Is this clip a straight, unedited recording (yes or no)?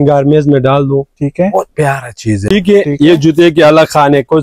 no